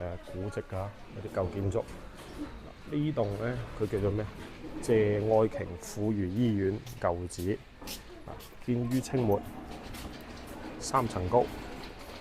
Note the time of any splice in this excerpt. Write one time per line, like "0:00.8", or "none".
none